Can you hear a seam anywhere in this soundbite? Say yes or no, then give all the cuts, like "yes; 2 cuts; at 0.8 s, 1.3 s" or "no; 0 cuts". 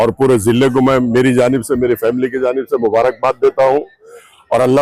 no; 0 cuts